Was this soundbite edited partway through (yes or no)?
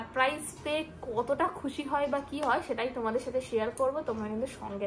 no